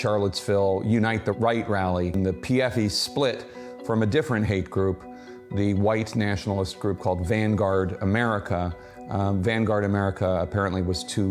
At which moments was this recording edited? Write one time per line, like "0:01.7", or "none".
0:02.1